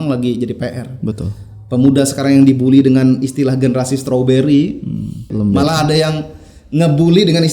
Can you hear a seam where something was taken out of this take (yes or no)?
yes